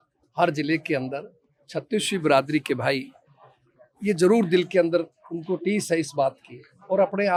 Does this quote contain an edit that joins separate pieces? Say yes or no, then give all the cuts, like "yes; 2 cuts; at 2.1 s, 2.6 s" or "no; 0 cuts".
no; 0 cuts